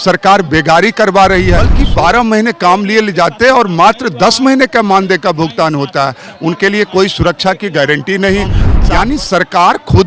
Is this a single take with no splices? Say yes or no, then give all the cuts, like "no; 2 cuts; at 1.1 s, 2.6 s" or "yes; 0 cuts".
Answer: no; 2 cuts; at 1.8 s, 8.7 s